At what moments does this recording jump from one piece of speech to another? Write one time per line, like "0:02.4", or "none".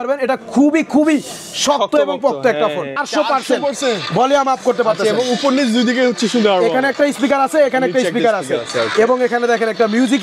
0:03.0